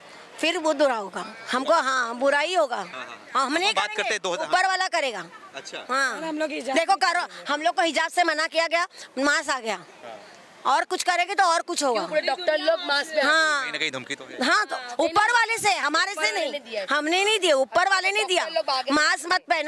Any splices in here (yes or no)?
no